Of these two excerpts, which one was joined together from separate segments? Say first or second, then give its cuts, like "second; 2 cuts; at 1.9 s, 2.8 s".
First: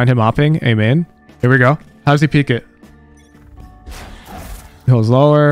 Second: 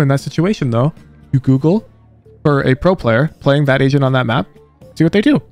first; 1 cut; at 1.2 s